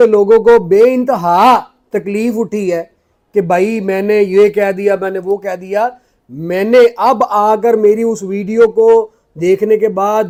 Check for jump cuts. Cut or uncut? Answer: uncut